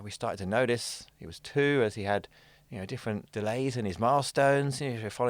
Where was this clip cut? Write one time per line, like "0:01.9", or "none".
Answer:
0:03.3